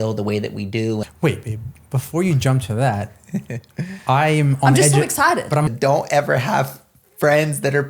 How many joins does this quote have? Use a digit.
2